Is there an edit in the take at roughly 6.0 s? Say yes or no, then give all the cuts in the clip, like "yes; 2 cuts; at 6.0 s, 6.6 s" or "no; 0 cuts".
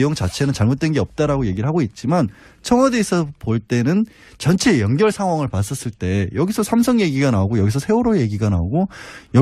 no; 1 cut; at 4.4 s